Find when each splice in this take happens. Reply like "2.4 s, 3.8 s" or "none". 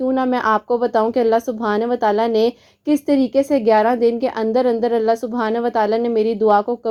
none